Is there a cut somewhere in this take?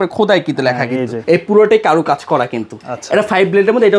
yes; 1 cut; at 1.2 s

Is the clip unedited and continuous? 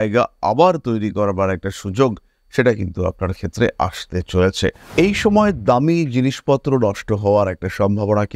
no; 1 cut; at 4.8 s

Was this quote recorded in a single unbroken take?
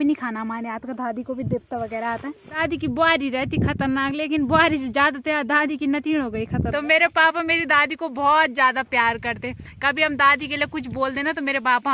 no; 2 cuts; at 2.6 s, 6.7 s

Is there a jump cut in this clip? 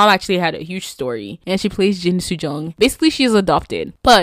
yes; 2 cuts; at 1.3 s, 2.7 s

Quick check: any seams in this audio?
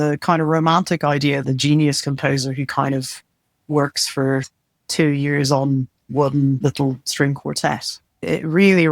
yes; 3 cuts; at 1.4 s, 6.6 s, 8.2 s

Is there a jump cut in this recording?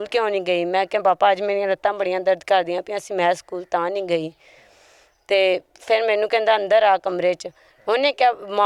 no; 0 cuts

